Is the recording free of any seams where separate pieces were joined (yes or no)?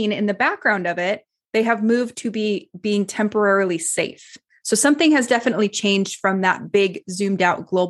no